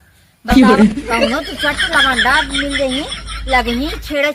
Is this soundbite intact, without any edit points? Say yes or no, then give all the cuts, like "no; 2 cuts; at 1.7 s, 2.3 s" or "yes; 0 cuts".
yes; 0 cuts